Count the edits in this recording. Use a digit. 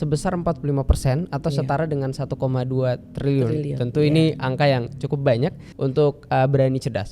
1